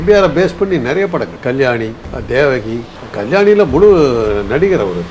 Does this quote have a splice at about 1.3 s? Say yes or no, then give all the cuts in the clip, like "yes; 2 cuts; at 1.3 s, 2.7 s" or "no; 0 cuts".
yes; 2 cuts; at 1.3 s, 2.1 s